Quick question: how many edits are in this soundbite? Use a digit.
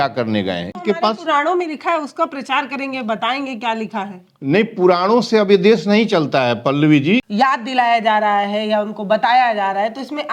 2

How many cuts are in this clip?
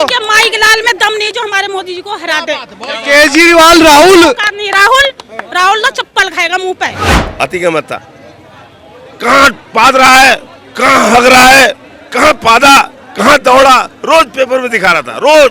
1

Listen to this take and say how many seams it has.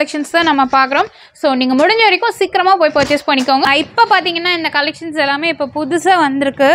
1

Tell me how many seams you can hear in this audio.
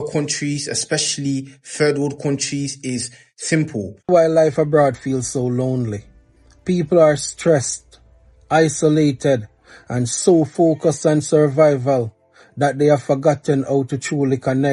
1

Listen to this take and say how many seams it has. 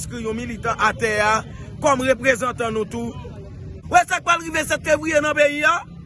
1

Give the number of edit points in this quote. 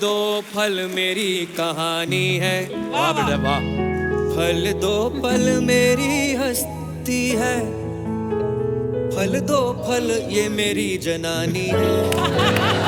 0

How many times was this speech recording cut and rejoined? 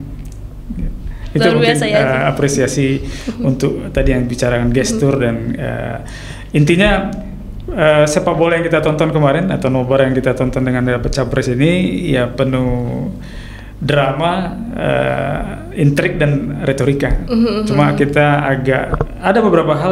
0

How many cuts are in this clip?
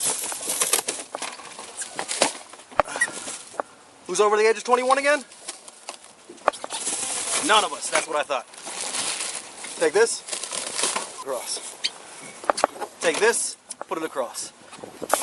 1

